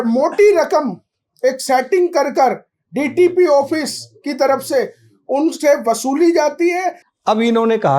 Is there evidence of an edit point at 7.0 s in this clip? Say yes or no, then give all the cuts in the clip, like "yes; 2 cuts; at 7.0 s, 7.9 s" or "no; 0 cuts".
yes; 1 cut; at 7.0 s